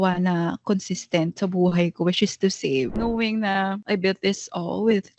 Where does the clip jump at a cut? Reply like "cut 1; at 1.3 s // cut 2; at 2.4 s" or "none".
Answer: cut 1; at 2.9 s // cut 2; at 3.8 s